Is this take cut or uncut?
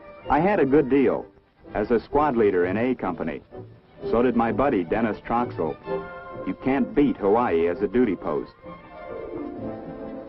uncut